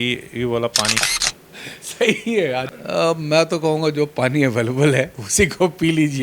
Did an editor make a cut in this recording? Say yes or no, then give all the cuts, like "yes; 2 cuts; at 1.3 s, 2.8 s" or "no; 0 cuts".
yes; 2 cuts; at 1.0 s, 2.8 s